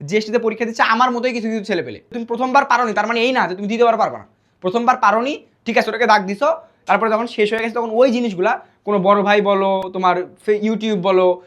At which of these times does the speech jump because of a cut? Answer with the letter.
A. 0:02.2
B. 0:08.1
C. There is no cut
A